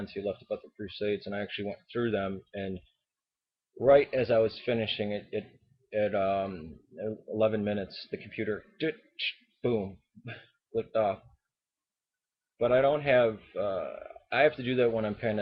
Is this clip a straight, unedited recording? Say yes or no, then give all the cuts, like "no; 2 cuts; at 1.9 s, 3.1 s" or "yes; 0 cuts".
no; 1 cut; at 3.9 s